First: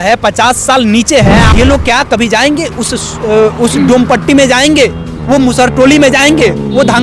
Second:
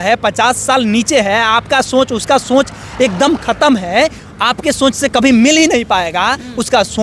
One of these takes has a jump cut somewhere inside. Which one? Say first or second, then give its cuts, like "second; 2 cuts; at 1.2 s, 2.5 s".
first; 1 cut; at 1.4 s